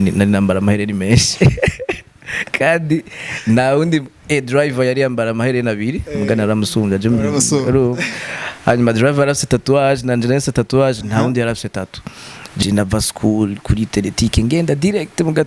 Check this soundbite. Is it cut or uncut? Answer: cut